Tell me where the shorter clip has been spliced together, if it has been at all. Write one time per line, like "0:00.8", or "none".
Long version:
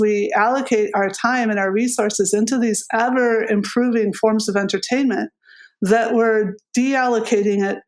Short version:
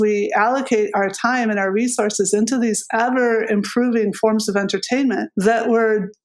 0:05.3